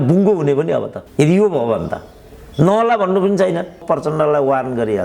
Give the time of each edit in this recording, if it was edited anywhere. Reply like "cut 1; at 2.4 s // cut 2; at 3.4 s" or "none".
cut 1; at 1.0 s // cut 2; at 3.8 s